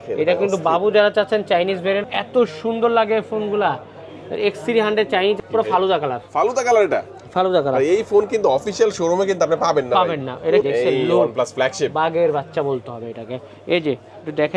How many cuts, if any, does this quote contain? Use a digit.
3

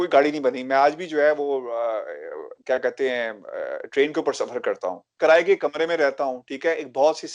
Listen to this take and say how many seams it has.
1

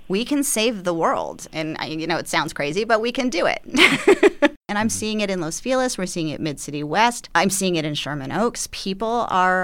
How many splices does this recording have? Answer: 2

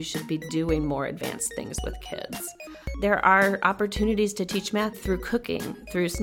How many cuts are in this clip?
2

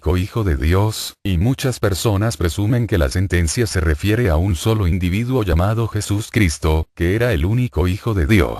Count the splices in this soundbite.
1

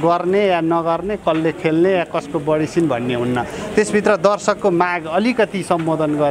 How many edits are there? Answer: 0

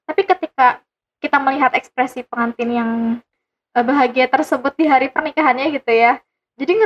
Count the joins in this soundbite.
0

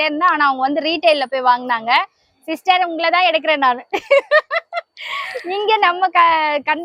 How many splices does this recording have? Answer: 0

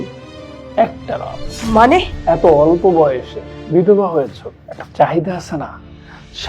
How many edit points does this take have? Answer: 2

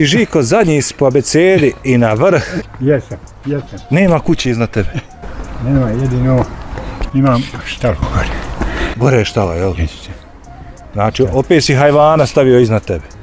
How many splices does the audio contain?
1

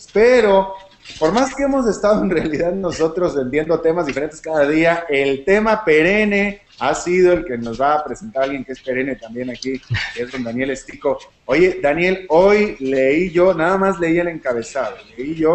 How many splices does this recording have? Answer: 1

